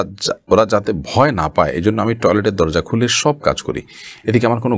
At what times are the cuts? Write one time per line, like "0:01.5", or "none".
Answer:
none